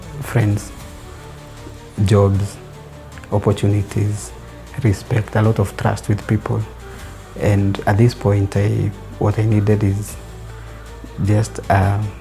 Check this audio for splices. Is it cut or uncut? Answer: uncut